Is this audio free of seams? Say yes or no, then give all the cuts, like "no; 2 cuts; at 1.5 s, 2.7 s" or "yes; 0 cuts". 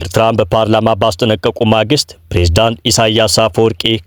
yes; 0 cuts